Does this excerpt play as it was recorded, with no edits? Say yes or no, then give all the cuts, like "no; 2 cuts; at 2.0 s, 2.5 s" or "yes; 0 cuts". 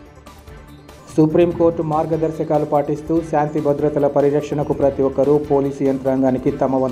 yes; 0 cuts